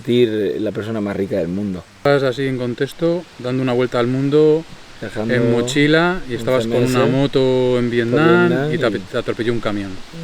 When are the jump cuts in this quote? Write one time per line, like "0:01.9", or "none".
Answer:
0:02.1